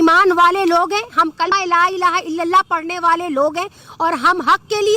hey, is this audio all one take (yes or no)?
no